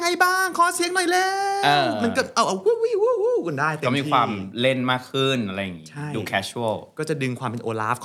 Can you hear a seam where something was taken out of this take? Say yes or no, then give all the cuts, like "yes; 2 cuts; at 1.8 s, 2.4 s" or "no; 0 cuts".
no; 0 cuts